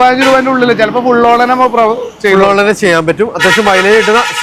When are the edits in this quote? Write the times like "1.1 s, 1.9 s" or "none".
none